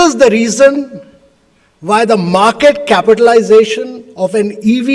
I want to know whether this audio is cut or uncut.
uncut